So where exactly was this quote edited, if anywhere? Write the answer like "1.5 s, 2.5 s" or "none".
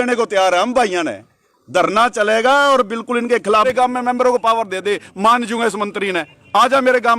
3.7 s

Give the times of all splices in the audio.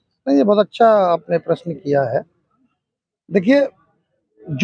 none

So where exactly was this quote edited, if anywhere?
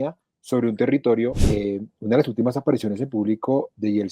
1.4 s

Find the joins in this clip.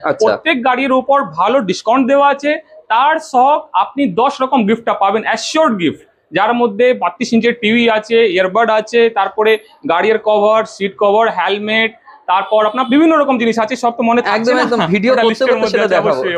none

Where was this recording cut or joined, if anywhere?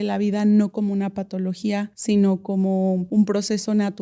1.9 s, 3.0 s

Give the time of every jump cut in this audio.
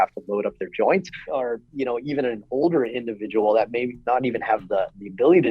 1.2 s

